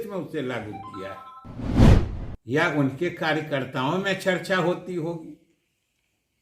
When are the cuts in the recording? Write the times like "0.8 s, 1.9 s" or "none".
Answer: 1.6 s, 2.1 s